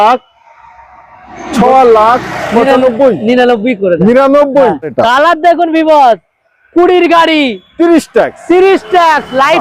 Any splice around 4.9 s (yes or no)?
yes